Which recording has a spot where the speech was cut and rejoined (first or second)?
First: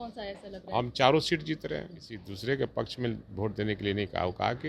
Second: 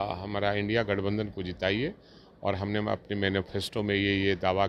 first